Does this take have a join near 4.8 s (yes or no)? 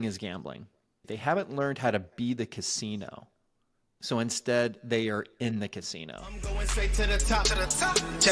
no